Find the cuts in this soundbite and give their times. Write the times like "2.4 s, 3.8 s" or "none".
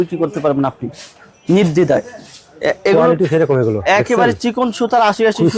none